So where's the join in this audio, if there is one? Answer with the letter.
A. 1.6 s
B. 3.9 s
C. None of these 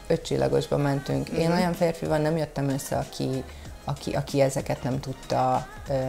C